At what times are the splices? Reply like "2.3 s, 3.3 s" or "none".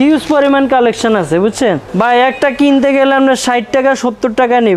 1.9 s

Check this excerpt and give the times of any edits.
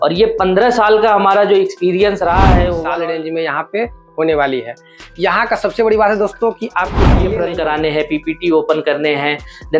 2.8 s, 7.3 s

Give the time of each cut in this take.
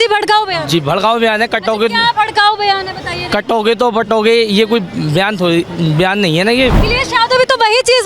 6.8 s

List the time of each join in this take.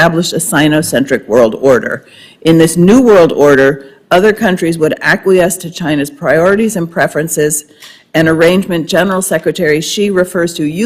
9.9 s

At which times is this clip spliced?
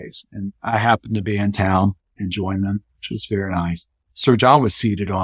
2.1 s, 4.0 s

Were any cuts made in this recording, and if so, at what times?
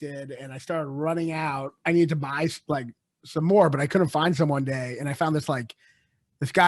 1.8 s

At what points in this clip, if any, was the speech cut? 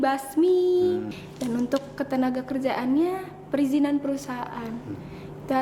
1.2 s

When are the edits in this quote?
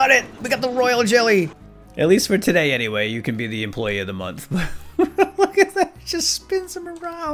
1.5 s

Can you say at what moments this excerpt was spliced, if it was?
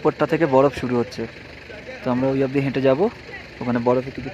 none

